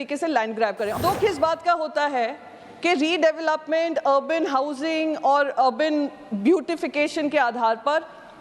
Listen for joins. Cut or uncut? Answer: cut